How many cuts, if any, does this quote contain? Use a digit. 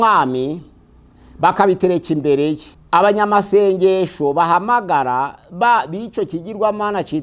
1